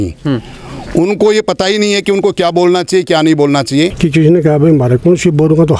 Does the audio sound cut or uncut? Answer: cut